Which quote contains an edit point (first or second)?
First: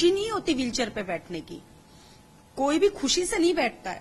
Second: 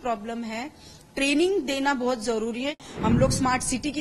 second